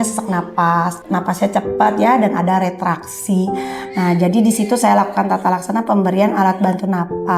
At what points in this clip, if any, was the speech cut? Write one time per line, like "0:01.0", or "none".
0:01.0